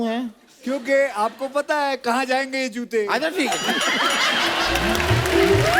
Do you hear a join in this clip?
no; 0 cuts

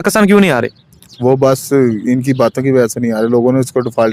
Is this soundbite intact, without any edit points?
yes; 0 cuts

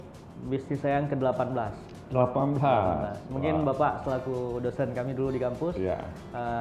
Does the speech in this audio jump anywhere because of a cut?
no; 0 cuts

